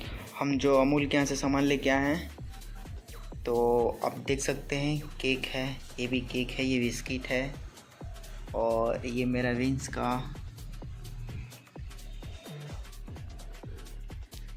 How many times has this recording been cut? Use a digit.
0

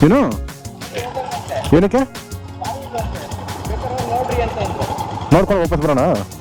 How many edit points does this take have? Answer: 0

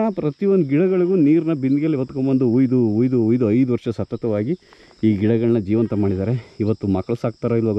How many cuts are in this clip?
0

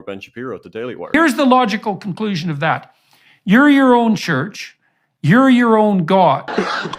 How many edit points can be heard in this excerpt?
0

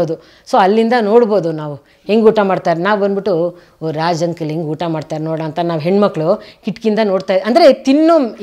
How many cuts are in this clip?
0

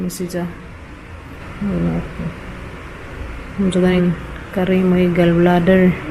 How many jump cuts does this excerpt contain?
2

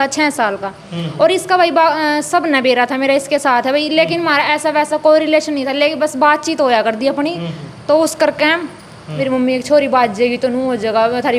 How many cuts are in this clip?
1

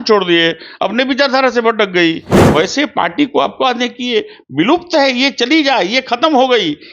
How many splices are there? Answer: 1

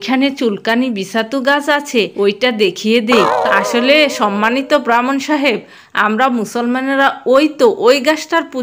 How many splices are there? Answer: 1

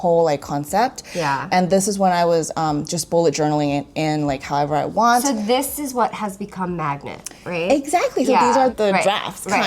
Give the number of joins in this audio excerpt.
1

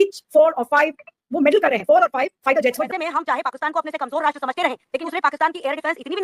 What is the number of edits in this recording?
2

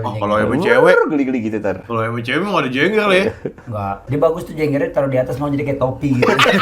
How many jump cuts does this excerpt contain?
1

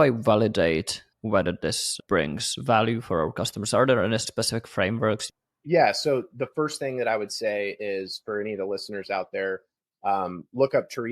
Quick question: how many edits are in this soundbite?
4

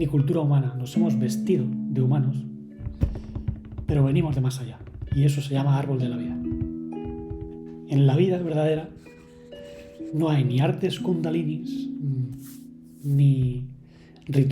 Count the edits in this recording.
0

